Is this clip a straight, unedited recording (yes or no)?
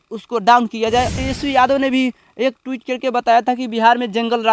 no